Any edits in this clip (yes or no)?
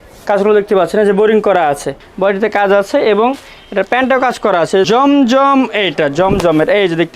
yes